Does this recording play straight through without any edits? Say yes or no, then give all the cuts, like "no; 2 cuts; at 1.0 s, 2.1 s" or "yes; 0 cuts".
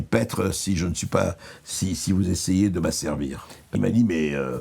no; 1 cut; at 3.7 s